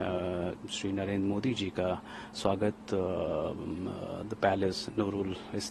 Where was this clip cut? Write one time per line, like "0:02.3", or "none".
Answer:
none